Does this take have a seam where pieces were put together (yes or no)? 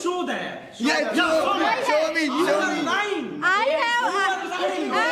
no